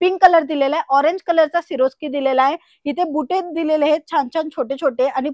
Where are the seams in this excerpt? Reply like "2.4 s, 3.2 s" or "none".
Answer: none